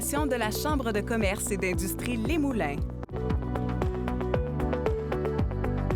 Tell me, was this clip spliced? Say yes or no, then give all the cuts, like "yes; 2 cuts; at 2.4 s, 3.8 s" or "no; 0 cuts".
yes; 1 cut; at 3.0 s